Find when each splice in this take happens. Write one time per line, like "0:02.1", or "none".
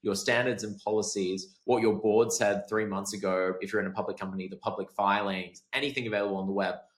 none

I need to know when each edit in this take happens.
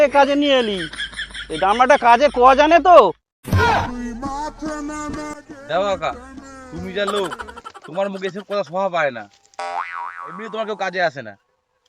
none

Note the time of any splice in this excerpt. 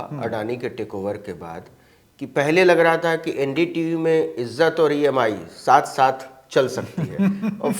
none

